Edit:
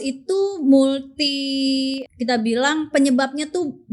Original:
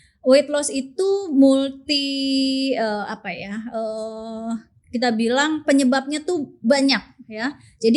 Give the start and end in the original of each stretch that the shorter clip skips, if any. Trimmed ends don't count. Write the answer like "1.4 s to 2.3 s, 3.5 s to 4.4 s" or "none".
2.7 s to 4.7 s